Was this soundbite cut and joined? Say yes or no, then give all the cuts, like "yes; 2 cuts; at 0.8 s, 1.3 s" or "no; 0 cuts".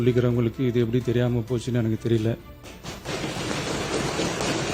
no; 0 cuts